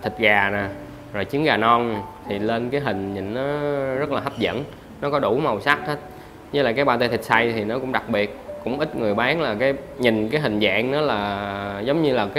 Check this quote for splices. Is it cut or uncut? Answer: uncut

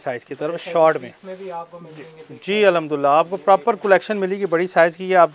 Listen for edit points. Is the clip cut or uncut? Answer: uncut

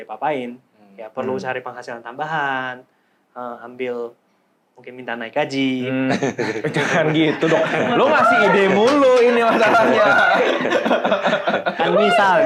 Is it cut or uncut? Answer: uncut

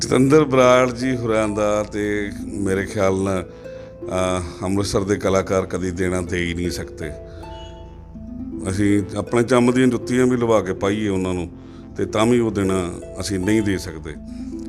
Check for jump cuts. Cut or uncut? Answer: uncut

